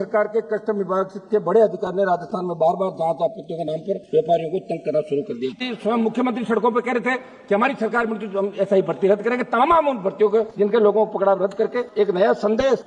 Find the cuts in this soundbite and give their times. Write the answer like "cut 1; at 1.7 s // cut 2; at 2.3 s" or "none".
cut 1; at 5.5 s